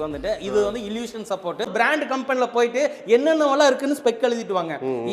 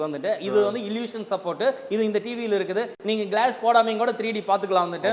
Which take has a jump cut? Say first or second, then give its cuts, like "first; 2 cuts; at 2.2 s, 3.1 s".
first; 1 cut; at 1.6 s